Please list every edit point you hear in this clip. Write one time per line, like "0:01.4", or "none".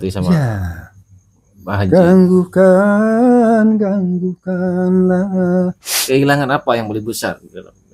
0:05.9

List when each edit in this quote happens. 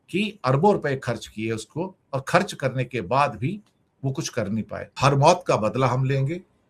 0:04.8

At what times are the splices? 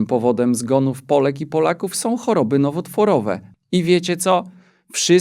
0:03.5

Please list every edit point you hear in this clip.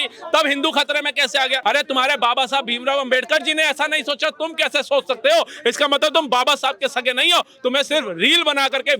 0:01.6

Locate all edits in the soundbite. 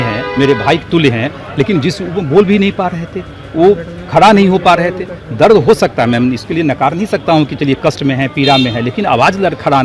none

